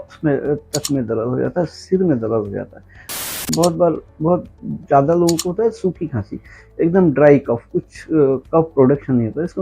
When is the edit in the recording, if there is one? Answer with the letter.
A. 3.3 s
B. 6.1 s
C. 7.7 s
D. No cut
A